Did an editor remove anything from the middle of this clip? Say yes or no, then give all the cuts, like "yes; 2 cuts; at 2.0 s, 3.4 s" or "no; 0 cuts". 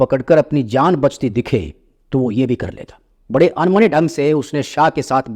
no; 0 cuts